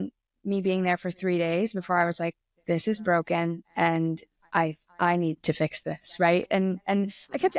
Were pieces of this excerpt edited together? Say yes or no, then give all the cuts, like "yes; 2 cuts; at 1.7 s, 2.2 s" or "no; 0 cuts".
no; 0 cuts